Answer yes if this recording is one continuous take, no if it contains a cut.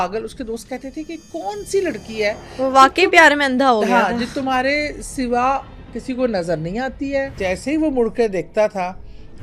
no